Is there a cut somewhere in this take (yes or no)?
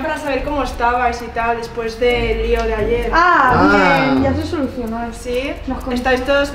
no